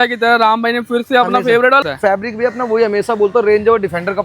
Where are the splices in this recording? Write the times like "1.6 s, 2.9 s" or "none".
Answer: 1.8 s